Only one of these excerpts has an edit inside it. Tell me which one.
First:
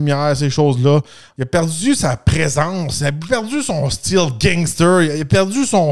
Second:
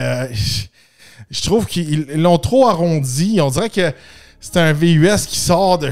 first; 1 cut; at 1.2 s

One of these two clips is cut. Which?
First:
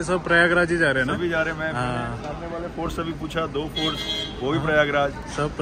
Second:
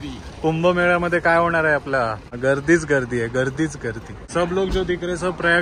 second; 2 cuts; at 2.2 s, 4.2 s

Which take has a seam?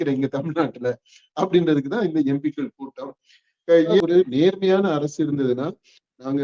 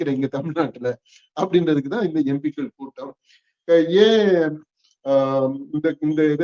first; 1 cut; at 4.0 s

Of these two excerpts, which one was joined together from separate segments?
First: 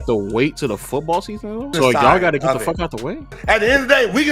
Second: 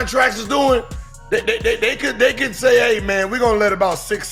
first; 2 cuts; at 1.7 s, 3.4 s

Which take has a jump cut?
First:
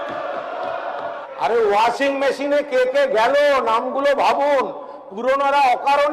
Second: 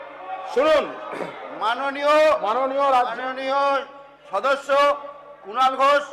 first; 1 cut; at 1.2 s

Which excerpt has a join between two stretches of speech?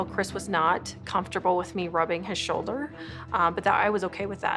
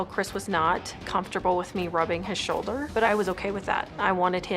second; 1 cut; at 3.0 s

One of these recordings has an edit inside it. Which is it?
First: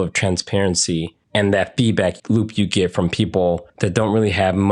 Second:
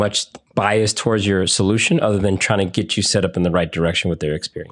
first; 3 cuts; at 1.2 s, 2.2 s, 3.7 s

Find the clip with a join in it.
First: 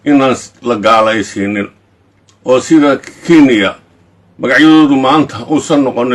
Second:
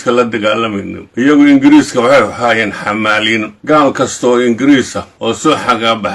second; 3 cuts; at 1.2 s, 3.5 s, 5.4 s

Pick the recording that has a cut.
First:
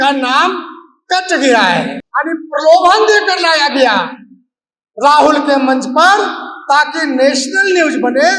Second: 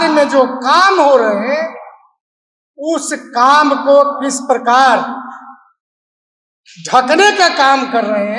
first; 1 cut; at 2.0 s

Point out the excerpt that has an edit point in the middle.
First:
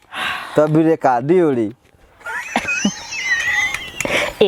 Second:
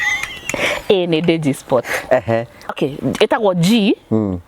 second; 1 cut; at 2.7 s

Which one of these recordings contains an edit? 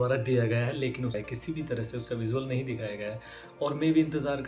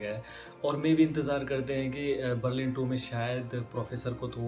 first; 1 cut; at 1.1 s

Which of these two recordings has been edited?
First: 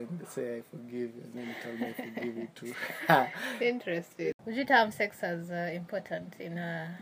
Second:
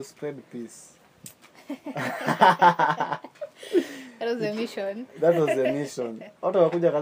first; 1 cut; at 4.4 s

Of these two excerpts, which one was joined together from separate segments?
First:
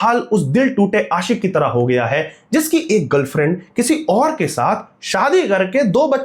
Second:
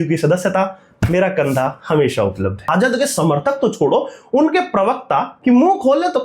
second; 2 cuts; at 2.7 s, 5.3 s

